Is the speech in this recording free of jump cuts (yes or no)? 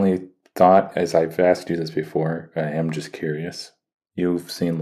yes